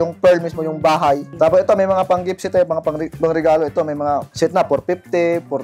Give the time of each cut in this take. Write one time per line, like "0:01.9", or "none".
0:01.3
0:03.1
0:04.3

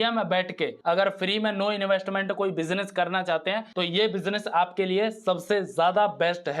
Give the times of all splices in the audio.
none

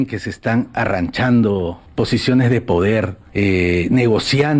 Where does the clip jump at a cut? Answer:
0:01.8
0:03.2

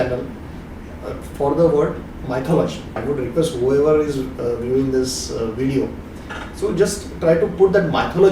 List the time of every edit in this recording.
0:03.0

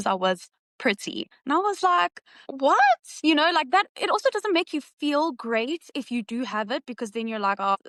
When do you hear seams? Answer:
none

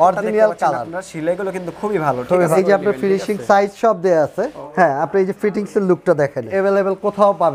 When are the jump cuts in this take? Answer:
0:02.5
0:04.6
0:06.5

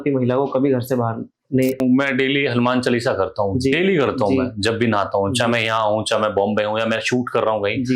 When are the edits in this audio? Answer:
0:01.8

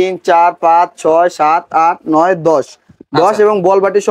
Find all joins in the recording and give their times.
none

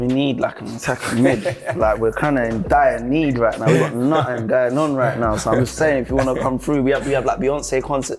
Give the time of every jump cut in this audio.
none

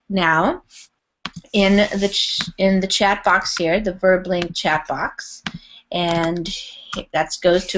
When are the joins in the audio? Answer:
none

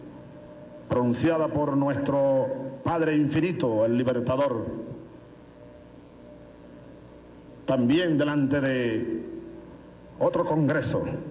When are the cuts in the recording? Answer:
0:05.8

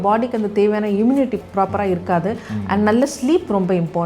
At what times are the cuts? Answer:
0:01.4

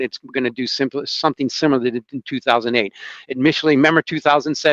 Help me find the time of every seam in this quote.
none

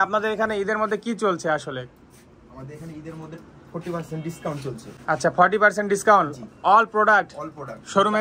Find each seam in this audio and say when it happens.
none

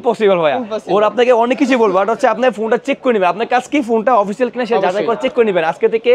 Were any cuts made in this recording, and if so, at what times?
none

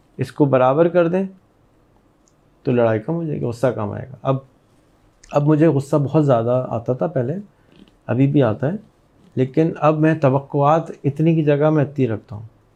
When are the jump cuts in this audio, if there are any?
none

